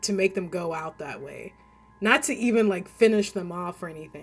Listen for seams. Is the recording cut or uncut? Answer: uncut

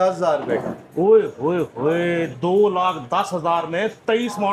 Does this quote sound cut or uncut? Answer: uncut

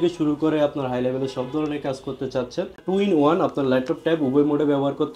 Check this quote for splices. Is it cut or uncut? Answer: cut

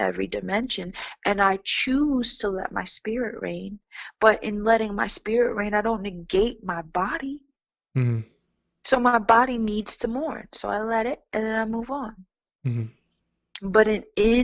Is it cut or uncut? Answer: uncut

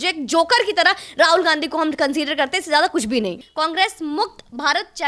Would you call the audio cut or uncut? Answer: cut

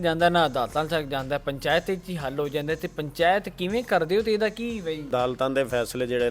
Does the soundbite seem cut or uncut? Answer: cut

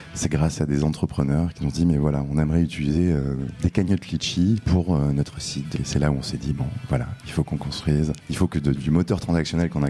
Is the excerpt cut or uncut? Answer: cut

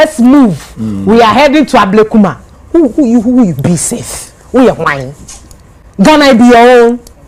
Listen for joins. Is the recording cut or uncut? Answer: uncut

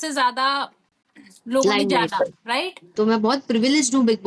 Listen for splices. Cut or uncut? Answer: cut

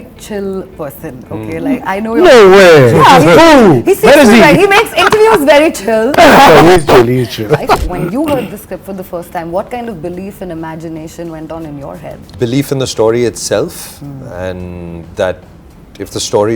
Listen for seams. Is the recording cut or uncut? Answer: cut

